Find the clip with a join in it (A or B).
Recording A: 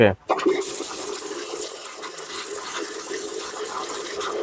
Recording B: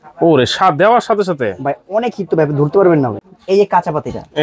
B